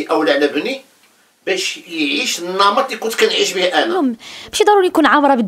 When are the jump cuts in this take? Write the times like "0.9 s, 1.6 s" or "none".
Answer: 4.0 s